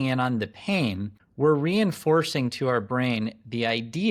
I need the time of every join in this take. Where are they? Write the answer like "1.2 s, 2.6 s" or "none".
none